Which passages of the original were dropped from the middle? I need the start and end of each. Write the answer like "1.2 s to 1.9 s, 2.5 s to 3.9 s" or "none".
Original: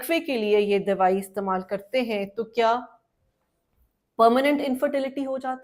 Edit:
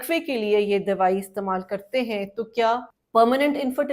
2.9 s to 4.0 s